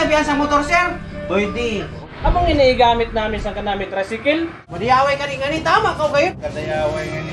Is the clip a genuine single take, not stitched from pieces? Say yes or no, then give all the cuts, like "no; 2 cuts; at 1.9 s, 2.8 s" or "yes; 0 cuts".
no; 1 cut; at 4.6 s